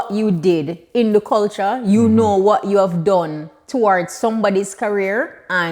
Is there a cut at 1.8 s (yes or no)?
no